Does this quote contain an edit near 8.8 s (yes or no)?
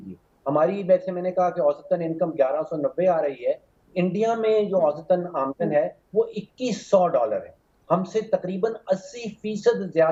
no